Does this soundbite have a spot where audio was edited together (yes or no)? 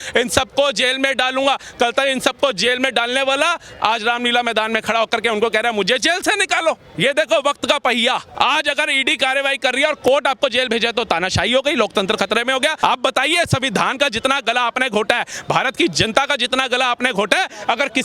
yes